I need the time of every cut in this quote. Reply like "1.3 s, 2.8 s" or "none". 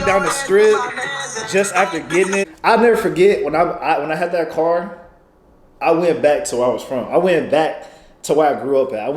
2.5 s